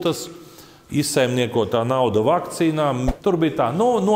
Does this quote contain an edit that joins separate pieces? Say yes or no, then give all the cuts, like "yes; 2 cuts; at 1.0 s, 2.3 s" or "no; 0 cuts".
yes; 1 cut; at 3.1 s